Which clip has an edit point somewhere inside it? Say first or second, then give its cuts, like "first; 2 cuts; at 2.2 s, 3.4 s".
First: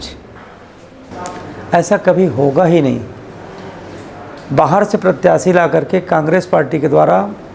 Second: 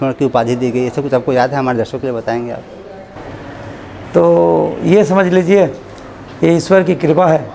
second; 1 cut; at 3.2 s